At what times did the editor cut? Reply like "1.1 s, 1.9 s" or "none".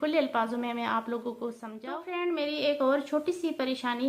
2.1 s